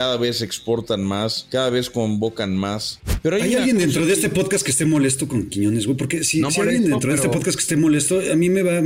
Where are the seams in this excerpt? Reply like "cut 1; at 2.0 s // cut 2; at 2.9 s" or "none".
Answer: cut 1; at 1.4 s // cut 2; at 3.4 s